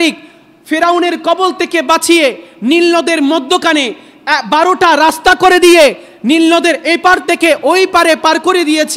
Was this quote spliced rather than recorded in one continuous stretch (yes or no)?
no